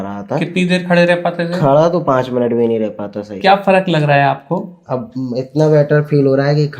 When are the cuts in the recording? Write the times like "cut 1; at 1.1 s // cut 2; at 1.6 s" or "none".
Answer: cut 1; at 3.4 s

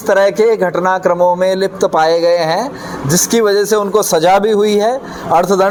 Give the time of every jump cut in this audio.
none

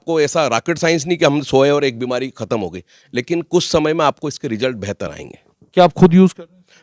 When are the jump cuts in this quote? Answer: none

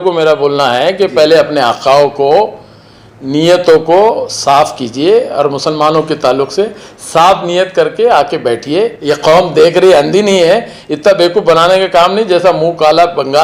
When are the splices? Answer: cut 1; at 9.0 s

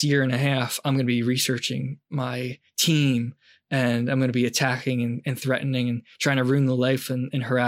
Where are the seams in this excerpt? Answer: none

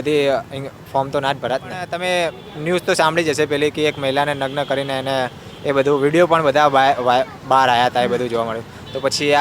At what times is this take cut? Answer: cut 1; at 1.9 s

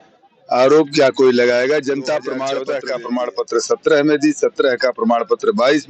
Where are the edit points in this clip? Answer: cut 1; at 2.5 s

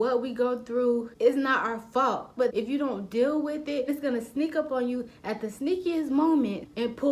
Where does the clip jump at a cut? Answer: cut 1; at 2.4 s // cut 2; at 3.9 s

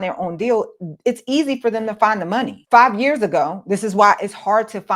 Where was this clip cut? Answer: cut 1; at 2.6 s

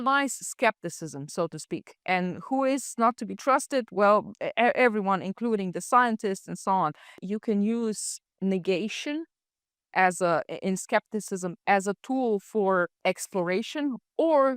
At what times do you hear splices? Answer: cut 1; at 7.2 s // cut 2; at 12.9 s

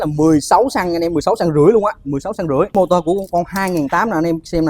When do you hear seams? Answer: cut 1; at 2.7 s

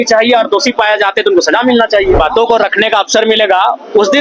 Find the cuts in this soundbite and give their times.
cut 1; at 2.2 s

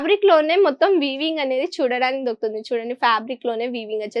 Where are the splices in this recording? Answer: none

